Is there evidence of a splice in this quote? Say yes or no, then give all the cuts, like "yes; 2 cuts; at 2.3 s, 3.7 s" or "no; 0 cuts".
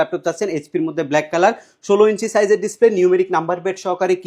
no; 0 cuts